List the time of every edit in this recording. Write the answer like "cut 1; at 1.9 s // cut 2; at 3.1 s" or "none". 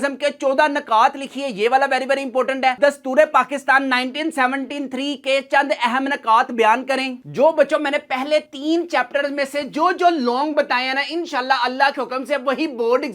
cut 1; at 2.8 s // cut 2; at 7.2 s